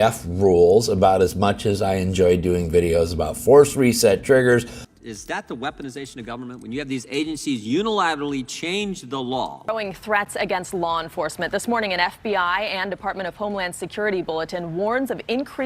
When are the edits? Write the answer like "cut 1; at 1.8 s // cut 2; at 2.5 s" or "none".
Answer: cut 1; at 4.8 s // cut 2; at 9.6 s